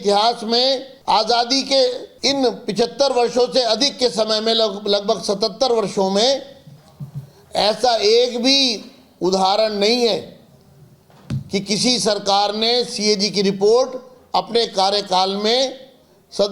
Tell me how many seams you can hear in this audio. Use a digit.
2